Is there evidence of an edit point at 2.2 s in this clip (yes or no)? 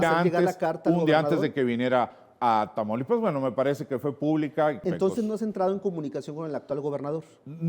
no